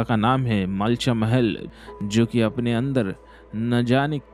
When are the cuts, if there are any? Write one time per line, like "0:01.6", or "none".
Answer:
0:01.7